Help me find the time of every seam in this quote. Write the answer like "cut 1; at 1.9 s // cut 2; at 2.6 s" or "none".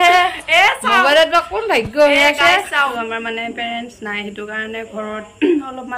cut 1; at 2.9 s